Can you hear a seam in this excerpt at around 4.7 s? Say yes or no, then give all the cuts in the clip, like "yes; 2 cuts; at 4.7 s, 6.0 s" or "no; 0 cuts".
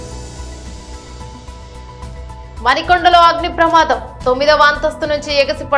no; 1 cut; at 0.9 s